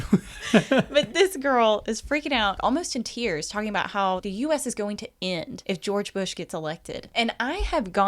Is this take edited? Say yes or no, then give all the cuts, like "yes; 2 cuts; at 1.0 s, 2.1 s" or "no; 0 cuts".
yes; 4 cuts; at 2.6 s, 4.2 s, 5.5 s, 7.0 s